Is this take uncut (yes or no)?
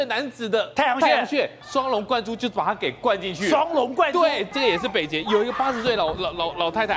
no